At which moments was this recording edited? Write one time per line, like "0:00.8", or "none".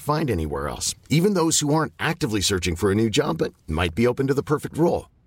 none